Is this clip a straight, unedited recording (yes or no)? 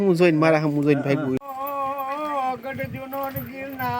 no